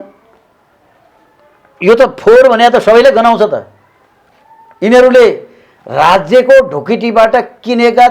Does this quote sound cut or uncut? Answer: uncut